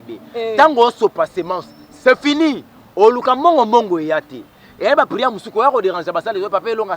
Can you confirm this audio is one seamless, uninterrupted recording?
yes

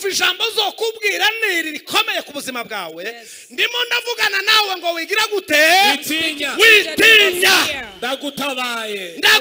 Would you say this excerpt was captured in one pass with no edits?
yes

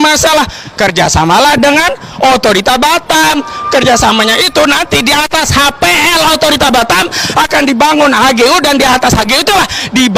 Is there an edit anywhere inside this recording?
no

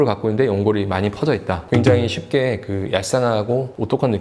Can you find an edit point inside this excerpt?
yes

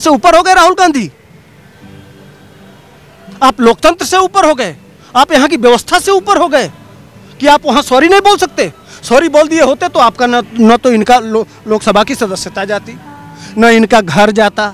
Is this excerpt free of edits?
yes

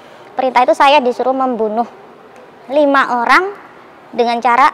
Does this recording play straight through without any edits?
yes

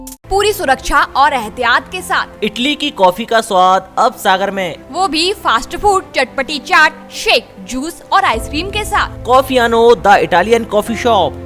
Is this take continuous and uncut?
yes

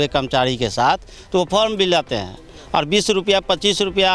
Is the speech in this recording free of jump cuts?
yes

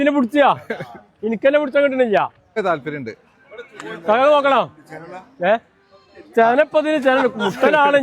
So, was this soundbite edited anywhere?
yes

